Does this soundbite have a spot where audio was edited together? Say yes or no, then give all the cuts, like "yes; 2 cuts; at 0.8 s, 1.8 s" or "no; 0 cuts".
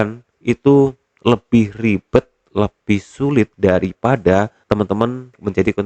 yes; 2 cuts; at 3.5 s, 5.0 s